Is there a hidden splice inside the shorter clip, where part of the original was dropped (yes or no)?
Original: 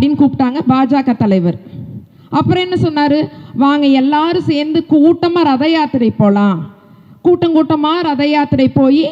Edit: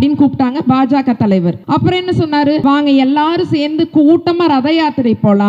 yes